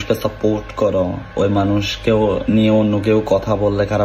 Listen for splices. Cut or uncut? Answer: cut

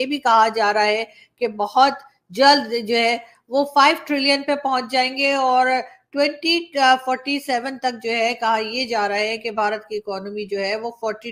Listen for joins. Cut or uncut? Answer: uncut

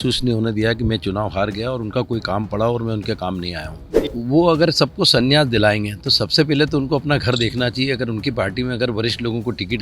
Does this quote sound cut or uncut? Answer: cut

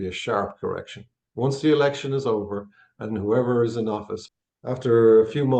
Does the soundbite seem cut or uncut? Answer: cut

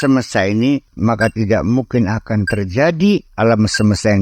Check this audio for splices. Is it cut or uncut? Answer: cut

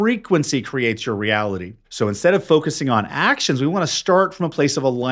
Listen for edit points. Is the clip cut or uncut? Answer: cut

